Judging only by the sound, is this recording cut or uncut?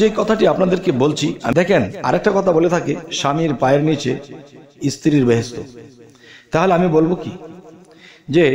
cut